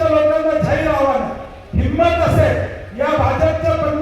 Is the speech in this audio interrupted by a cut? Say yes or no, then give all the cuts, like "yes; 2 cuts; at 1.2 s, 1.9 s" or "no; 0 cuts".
no; 0 cuts